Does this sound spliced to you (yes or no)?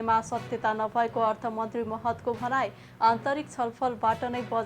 no